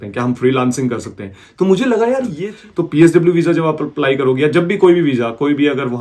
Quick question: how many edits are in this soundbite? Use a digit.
1